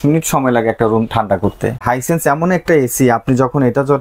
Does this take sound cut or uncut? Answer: cut